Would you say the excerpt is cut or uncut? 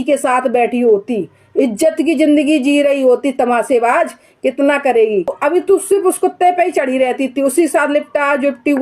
cut